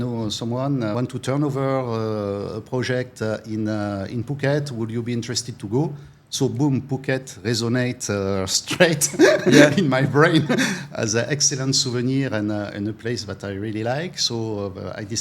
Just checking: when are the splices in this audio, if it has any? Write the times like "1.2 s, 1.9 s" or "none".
0.9 s